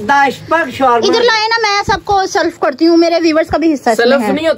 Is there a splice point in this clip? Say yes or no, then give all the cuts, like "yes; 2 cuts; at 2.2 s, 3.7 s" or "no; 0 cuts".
no; 0 cuts